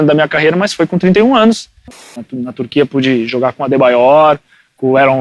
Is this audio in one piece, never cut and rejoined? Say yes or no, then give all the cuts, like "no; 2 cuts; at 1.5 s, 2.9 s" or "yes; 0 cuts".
no; 1 cut; at 2.2 s